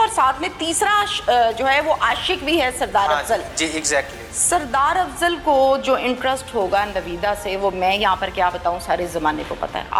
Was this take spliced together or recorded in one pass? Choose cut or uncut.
uncut